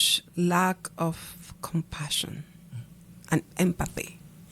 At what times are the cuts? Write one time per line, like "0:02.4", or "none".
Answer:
0:03.5